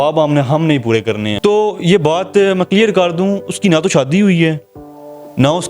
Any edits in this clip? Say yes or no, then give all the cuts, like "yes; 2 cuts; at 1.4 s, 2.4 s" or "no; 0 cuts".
yes; 1 cut; at 1.3 s